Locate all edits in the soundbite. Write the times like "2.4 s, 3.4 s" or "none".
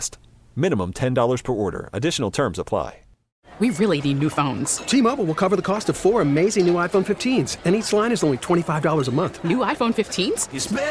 3.4 s